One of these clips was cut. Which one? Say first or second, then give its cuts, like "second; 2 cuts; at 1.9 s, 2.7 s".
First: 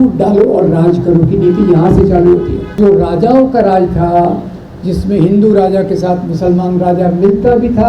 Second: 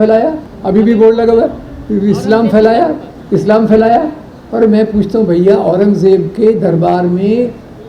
first; 1 cut; at 2.8 s